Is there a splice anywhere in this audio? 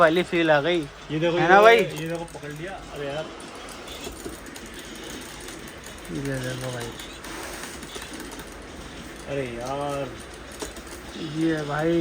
no; 0 cuts

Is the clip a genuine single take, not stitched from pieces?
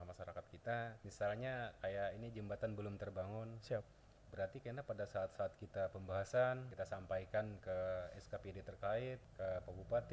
no; 3 cuts; at 1.0 s, 6.7 s, 9.3 s

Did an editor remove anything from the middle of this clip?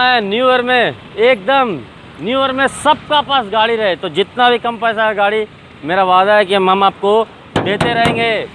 no; 0 cuts

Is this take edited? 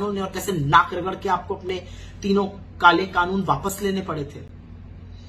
no; 0 cuts

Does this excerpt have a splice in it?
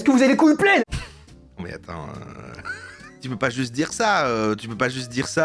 yes; 2 cuts; at 0.8 s, 3.1 s

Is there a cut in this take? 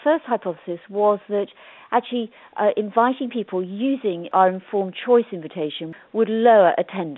yes; 1 cut; at 4.3 s

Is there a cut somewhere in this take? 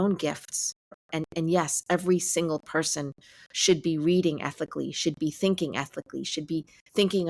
yes; 1 cut; at 1.0 s

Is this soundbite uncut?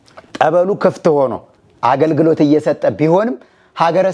yes; 0 cuts

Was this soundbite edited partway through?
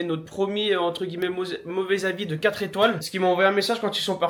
no; 0 cuts

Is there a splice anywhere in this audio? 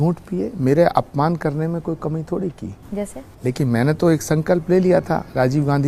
no; 0 cuts

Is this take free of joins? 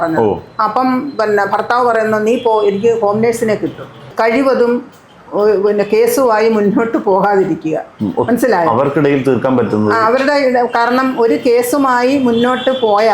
no; 1 cut; at 4.1 s

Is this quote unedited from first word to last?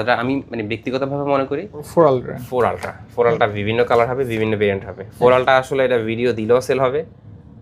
no; 1 cut; at 1.9 s

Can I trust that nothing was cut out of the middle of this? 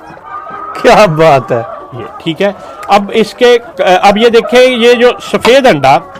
yes; 0 cuts

